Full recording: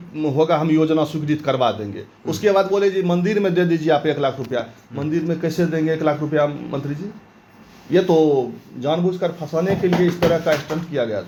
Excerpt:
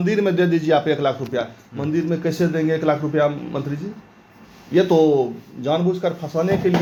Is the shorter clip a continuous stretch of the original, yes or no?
yes